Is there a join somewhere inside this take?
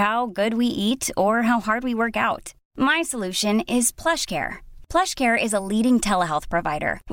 no; 0 cuts

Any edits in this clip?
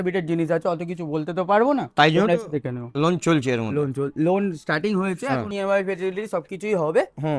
yes; 1 cut; at 5.5 s

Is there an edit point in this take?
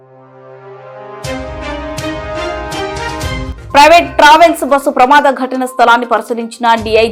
no; 0 cuts

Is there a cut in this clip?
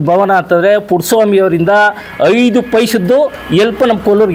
no; 0 cuts

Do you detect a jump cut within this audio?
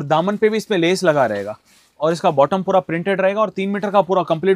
no; 0 cuts

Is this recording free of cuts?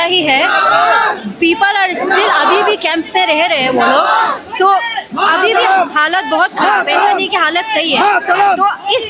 yes; 0 cuts

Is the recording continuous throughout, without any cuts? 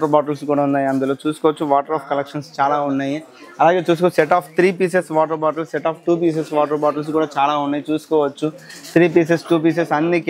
yes; 0 cuts

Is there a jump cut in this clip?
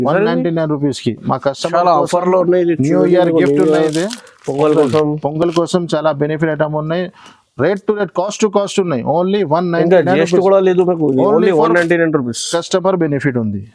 no; 0 cuts

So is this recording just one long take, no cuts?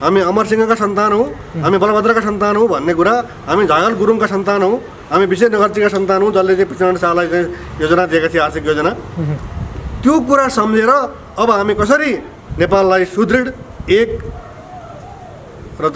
yes; 0 cuts

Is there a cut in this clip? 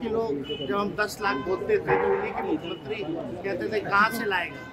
no; 0 cuts

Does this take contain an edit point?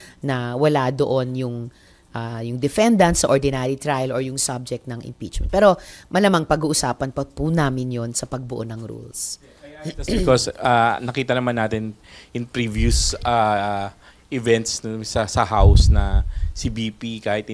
no; 0 cuts

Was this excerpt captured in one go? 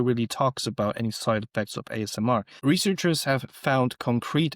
no; 1 cut; at 2.5 s

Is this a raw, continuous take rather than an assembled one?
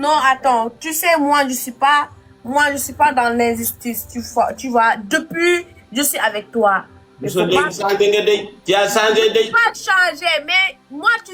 yes; 0 cuts

